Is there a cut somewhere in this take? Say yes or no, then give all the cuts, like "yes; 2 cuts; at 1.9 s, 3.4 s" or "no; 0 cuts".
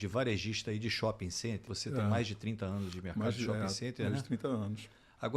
yes; 1 cut; at 1.7 s